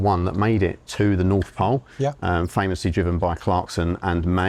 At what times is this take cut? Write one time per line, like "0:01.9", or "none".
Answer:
none